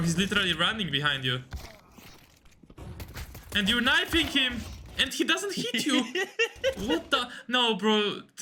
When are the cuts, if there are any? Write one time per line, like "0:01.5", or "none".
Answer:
none